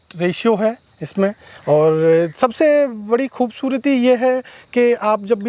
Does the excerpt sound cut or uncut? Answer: uncut